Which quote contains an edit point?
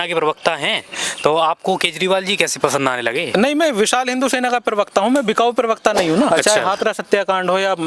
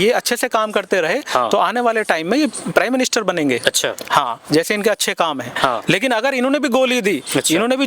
first; 1 cut; at 6.3 s

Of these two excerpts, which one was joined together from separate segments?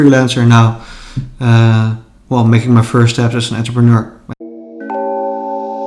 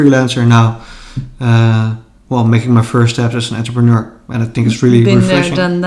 first; 1 cut; at 4.2 s

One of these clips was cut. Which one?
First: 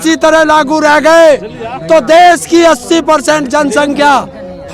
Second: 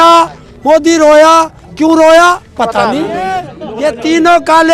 second; 1 cut; at 3.6 s

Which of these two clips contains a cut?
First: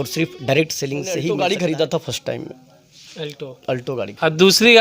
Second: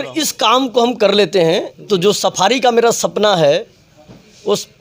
first; 1 cut; at 1.2 s

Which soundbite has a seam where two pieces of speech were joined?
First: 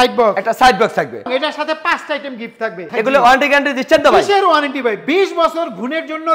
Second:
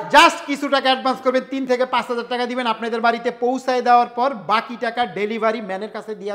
first; 2 cuts; at 1.3 s, 2.8 s

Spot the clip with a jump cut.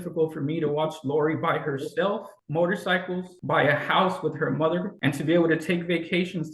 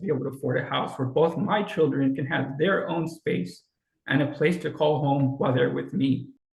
first; 3 cuts; at 2.4 s, 3.3 s, 4.9 s

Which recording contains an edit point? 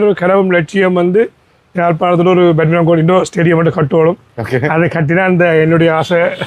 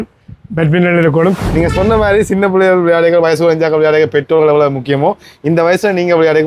second; 1 cut; at 1.4 s

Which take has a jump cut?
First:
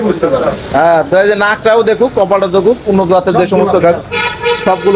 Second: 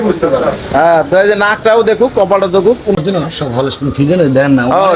second; 1 cut; at 3.0 s

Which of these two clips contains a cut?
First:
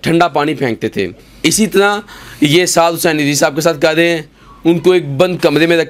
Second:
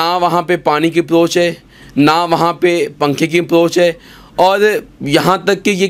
first; 1 cut; at 1.3 s

